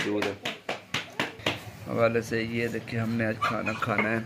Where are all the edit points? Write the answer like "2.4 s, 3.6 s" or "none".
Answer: 1.4 s